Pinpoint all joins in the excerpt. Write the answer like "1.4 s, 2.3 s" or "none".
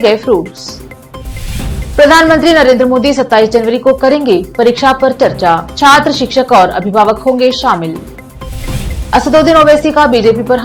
none